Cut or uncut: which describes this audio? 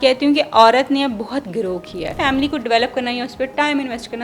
cut